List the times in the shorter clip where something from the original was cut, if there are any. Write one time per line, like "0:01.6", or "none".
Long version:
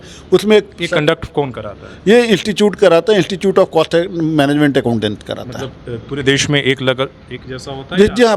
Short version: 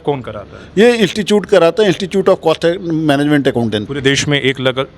0:03.9